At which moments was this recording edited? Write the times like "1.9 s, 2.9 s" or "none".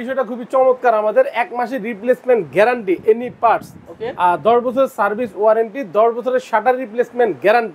none